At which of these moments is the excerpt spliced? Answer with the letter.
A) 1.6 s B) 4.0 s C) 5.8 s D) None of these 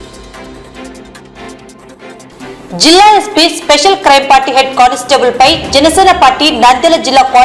A